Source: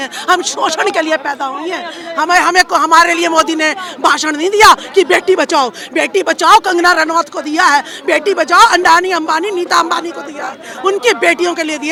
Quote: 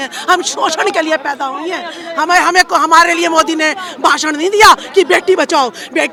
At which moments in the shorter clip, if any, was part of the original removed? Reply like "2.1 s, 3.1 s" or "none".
none